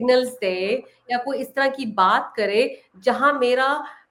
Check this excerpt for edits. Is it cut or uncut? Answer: uncut